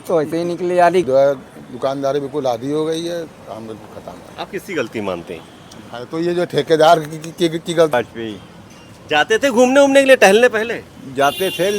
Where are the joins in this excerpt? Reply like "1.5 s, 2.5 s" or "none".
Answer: 1.0 s, 7.9 s